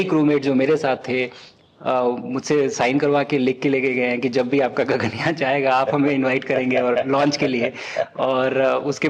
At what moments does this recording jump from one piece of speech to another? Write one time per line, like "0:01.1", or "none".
none